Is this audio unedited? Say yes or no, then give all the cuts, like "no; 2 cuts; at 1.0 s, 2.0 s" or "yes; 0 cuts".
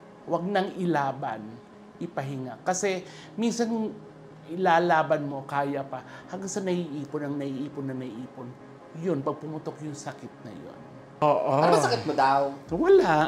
no; 1 cut; at 11.2 s